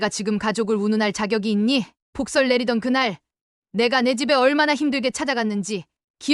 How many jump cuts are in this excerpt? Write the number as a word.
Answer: zero